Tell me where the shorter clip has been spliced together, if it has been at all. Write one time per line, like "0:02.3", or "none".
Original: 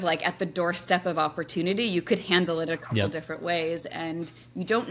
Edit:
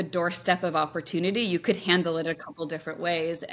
none